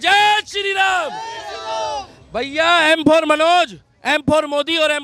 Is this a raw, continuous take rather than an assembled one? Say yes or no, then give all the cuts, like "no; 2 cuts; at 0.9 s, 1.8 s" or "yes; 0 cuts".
yes; 0 cuts